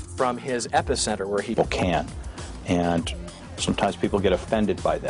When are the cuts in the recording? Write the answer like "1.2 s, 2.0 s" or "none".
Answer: none